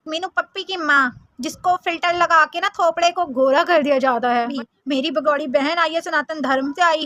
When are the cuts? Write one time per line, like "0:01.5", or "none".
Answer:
0:04.5